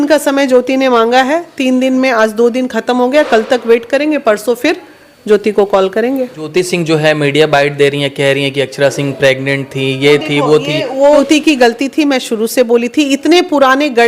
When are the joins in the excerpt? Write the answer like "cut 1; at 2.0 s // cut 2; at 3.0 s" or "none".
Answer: cut 1; at 6.5 s // cut 2; at 11.0 s